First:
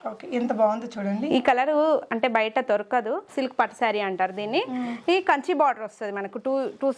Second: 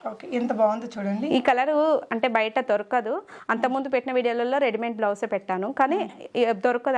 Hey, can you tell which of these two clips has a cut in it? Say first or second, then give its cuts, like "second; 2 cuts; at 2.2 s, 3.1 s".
first; 1 cut; at 3.3 s